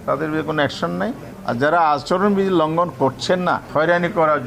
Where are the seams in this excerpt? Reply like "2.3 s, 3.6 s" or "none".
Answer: 1.3 s, 3.6 s